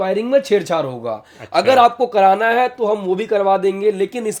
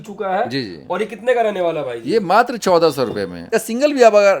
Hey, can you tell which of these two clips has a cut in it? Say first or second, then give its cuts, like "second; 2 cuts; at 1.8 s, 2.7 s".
second; 1 cut; at 3.4 s